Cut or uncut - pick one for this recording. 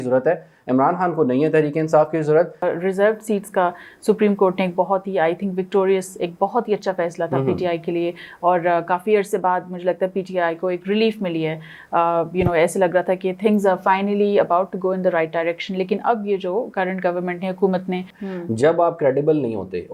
cut